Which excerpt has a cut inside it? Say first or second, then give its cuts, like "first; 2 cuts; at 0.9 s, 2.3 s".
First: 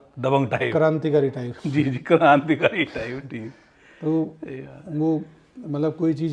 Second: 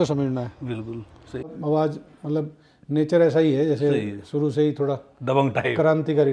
second; 1 cut; at 1.5 s